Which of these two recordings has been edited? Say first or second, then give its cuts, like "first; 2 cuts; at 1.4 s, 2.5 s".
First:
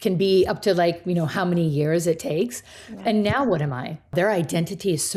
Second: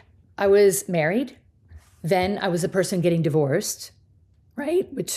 first; 1 cut; at 4.1 s